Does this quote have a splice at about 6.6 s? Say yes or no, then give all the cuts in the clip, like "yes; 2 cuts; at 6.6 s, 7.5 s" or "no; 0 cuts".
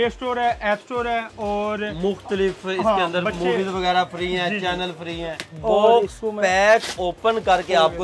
no; 1 cut; at 5.4 s